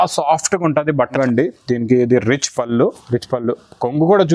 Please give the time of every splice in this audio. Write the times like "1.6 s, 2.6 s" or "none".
1.1 s